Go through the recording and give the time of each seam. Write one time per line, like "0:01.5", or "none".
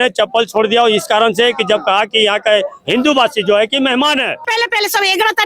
0:04.4